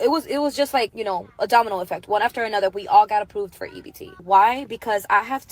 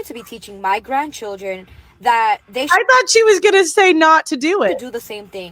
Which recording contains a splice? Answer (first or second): first